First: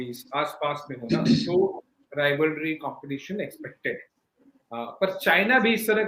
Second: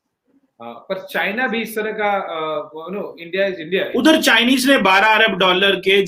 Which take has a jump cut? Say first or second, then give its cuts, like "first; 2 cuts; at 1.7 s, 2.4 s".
second; 1 cut; at 3.9 s